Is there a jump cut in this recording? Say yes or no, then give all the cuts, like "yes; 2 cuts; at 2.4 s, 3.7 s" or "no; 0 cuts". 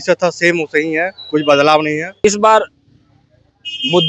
yes; 1 cut; at 2.2 s